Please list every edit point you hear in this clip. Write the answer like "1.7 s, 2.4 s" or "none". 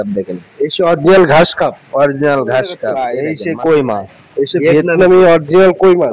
3.0 s